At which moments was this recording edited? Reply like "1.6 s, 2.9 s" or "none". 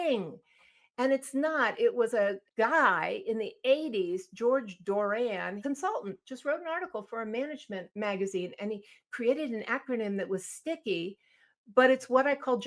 2.4 s, 5.6 s, 7.9 s